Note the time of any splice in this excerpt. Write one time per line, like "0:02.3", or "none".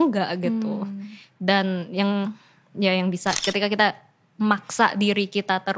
0:03.4